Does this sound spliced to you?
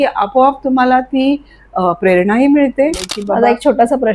yes; 1 cut; at 3.1 s

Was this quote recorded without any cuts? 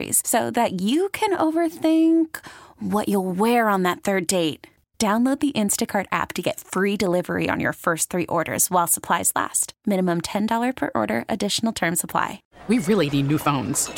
no; 1 cut; at 12.5 s

